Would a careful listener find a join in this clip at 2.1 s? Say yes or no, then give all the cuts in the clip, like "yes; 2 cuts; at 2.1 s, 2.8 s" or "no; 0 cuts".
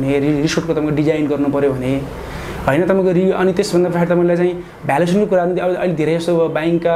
no; 0 cuts